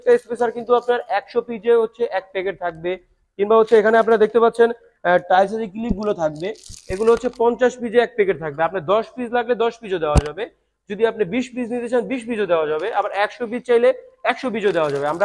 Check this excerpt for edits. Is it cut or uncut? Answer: uncut